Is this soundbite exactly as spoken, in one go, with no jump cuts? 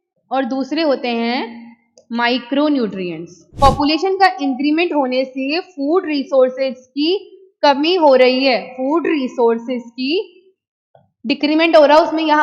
no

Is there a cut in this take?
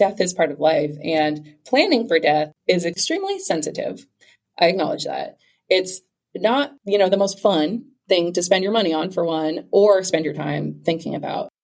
no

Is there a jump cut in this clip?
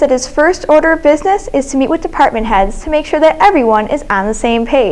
no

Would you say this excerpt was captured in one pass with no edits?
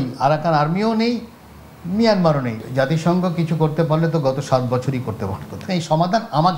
no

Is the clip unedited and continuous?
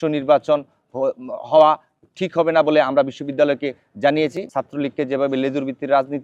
no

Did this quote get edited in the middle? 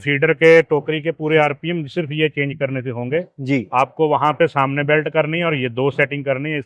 no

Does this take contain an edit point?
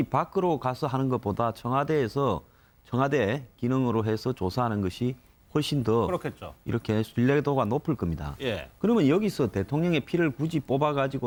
no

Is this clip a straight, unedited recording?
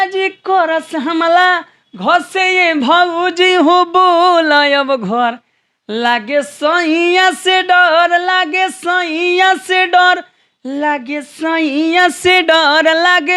yes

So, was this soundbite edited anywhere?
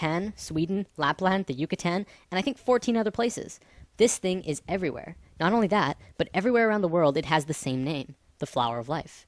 no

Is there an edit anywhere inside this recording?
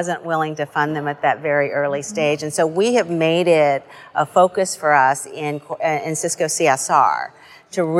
no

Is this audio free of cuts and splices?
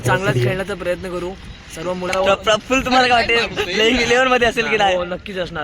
no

